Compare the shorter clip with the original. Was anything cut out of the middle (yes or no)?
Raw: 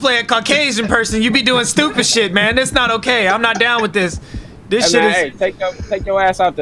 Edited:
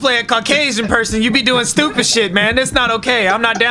no